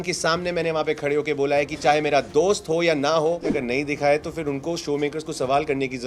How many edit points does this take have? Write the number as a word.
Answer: one